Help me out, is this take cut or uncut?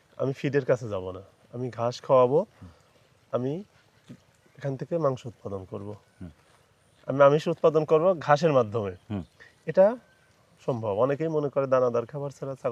uncut